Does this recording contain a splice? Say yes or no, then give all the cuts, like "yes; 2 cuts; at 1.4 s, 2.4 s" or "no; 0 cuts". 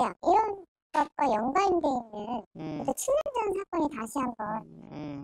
no; 0 cuts